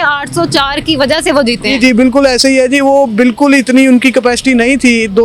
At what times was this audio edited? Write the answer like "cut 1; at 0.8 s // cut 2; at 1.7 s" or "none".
none